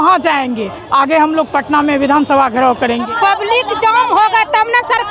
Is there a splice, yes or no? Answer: yes